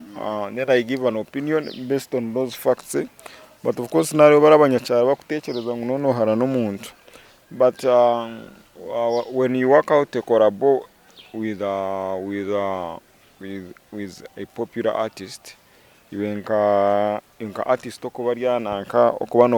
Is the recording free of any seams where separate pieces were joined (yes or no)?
yes